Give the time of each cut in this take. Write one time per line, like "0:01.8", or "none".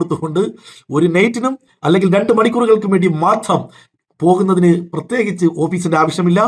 none

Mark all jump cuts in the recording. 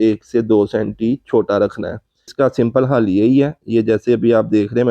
0:02.3

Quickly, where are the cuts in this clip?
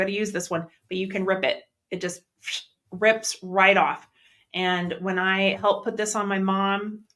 none

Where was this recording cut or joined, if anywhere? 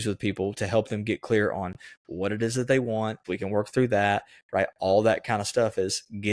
0:03.3

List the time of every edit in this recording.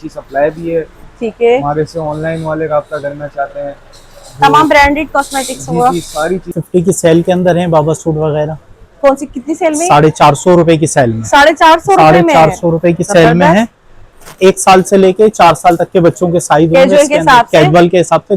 0:06.6

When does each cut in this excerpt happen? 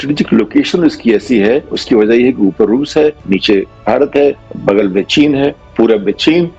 none

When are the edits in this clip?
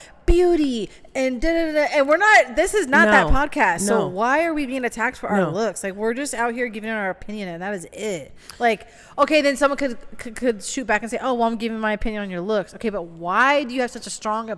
none

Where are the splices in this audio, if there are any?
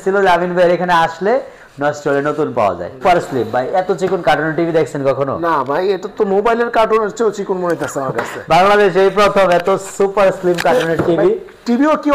0:03.0

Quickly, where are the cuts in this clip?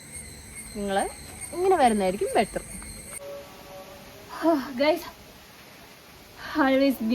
0:03.1

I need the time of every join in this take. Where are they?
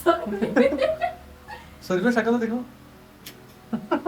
none

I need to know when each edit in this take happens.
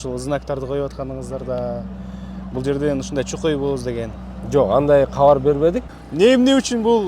0:05.9

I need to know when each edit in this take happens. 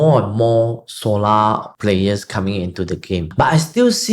0:01.7
0:03.3

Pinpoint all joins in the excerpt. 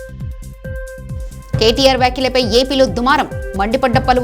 0:01.1

